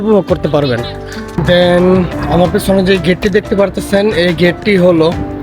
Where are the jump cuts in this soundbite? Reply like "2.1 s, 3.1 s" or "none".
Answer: 1.3 s

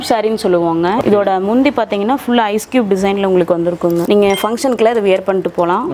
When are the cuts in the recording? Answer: 1.0 s, 4.0 s

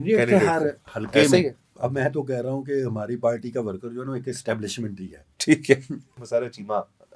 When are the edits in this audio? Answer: 1.6 s, 6.2 s

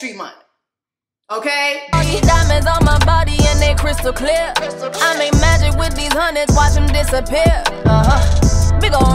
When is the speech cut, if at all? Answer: 1.8 s

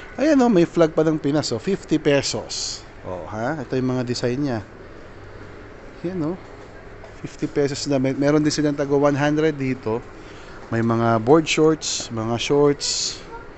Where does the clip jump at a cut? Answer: none

